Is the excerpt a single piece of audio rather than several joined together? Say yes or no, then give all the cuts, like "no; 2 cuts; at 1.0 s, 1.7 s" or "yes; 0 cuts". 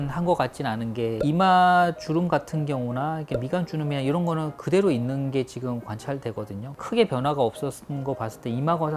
yes; 0 cuts